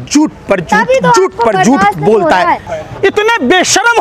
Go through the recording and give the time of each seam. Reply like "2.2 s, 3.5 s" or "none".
2.7 s